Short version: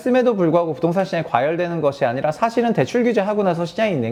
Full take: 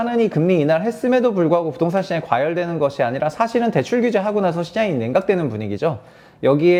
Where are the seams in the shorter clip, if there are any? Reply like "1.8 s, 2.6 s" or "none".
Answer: none